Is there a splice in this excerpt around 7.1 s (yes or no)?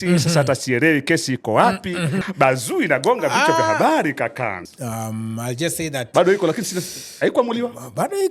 no